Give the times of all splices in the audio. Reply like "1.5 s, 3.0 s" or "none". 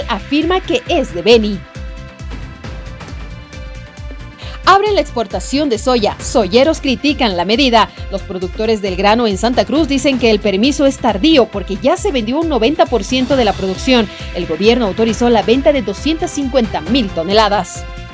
none